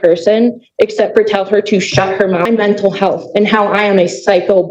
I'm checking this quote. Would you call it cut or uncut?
cut